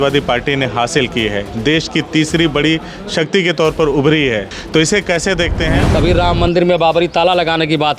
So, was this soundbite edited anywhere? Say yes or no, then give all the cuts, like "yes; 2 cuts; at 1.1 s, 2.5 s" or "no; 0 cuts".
yes; 2 cuts; at 4.5 s, 5.8 s